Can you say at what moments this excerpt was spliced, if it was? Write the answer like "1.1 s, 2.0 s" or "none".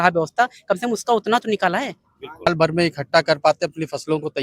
2.5 s